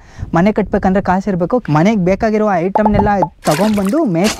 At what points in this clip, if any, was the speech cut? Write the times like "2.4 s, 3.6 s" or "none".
1.6 s